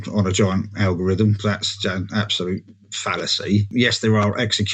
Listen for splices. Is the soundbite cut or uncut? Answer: cut